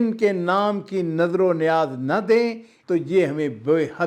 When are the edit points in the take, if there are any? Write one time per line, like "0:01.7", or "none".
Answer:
0:02.7